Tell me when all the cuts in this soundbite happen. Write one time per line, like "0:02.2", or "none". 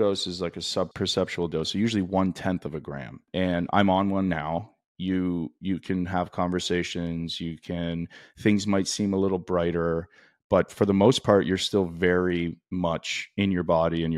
0:00.9
0:03.3